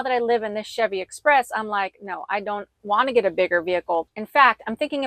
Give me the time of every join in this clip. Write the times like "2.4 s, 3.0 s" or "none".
4.0 s

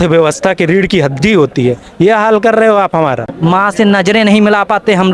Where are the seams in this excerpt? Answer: 3.3 s

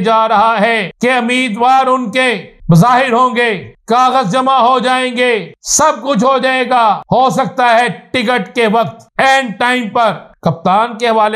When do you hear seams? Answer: 0.9 s, 2.5 s, 3.7 s, 5.6 s, 7.0 s, 9.0 s, 10.3 s

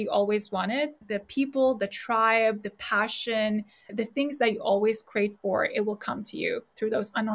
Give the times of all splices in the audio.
1.0 s, 3.9 s

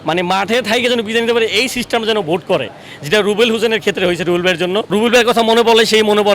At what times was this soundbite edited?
4.9 s

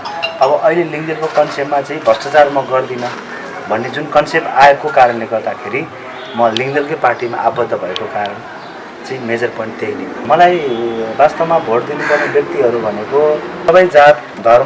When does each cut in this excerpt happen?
10.2 s

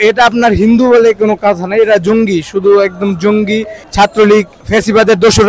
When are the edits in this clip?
3.8 s, 4.6 s

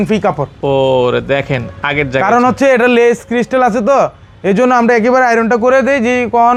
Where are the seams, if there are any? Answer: none

